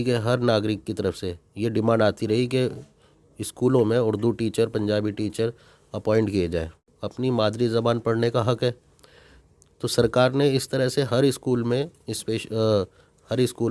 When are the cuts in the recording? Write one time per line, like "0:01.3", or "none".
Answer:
0:07.0